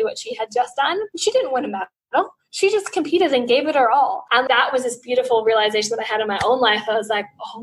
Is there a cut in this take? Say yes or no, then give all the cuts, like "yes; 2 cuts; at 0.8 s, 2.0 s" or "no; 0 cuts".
no; 0 cuts